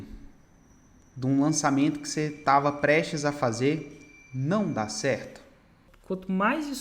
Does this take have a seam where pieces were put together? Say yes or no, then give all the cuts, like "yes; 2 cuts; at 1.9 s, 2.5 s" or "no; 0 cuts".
yes; 1 cut; at 5.9 s